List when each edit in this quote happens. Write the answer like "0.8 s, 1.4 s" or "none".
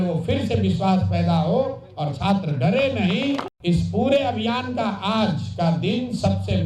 3.5 s